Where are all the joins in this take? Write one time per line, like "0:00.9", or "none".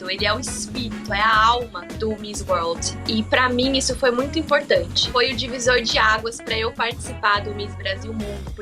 0:01.8
0:05.0